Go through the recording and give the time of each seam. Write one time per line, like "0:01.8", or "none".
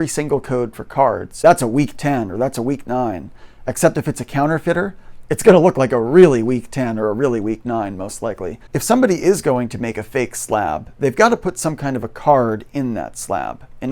0:01.4
0:08.6